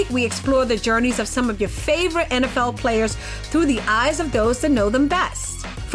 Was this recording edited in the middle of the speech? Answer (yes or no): no